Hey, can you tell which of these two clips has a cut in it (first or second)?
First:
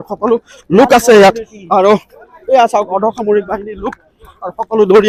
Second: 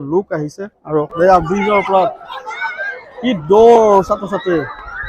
second